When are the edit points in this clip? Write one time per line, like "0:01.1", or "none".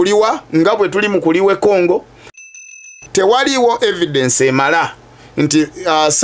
0:02.5